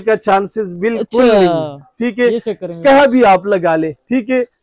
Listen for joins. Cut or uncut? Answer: uncut